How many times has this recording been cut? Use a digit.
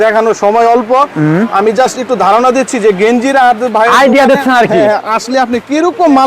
0